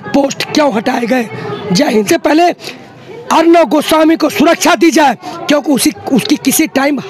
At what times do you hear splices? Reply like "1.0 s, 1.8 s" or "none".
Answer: 2.1 s